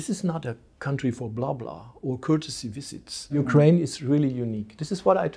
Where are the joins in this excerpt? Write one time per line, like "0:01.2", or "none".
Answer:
0:03.4